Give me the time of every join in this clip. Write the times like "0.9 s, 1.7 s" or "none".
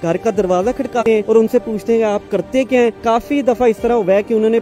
1.0 s, 2.9 s